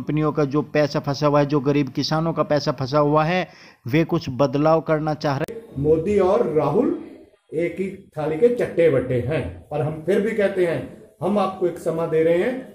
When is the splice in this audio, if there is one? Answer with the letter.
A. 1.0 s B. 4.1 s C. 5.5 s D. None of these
C